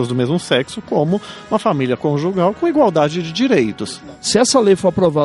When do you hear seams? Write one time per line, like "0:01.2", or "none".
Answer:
0:03.8